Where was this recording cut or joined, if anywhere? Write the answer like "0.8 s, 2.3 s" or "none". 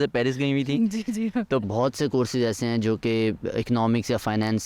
1.7 s

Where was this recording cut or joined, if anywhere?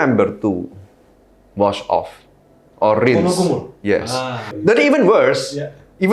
4.5 s

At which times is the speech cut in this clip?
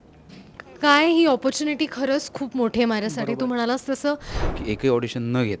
4.5 s

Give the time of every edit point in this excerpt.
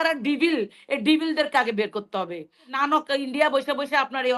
2.7 s

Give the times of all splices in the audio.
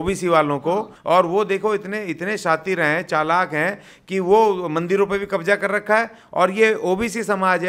0.9 s

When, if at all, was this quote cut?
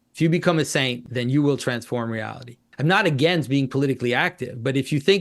1.0 s, 2.7 s

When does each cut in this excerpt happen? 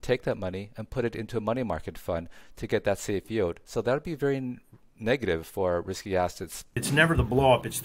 6.8 s

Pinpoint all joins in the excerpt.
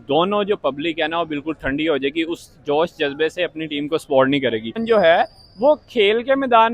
4.8 s

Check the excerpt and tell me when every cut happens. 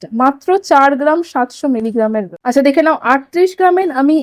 2.3 s

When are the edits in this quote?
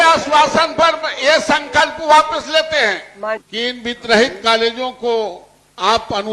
3.4 s

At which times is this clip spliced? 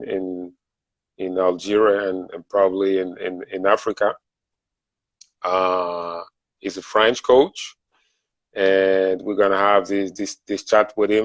2.1 s

